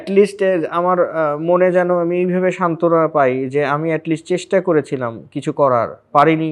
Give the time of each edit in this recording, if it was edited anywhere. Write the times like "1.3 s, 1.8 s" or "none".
none